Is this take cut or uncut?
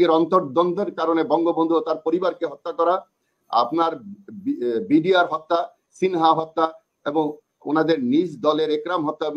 uncut